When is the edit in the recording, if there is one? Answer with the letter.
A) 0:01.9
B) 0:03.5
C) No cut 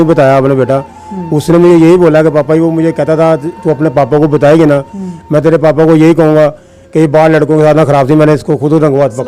C